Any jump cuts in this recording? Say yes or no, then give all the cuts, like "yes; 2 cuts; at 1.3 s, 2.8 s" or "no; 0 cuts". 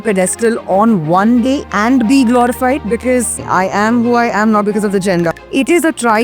yes; 3 cuts; at 1.6 s, 3.4 s, 5.3 s